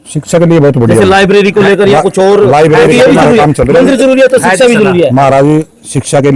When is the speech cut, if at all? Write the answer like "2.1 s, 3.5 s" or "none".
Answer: none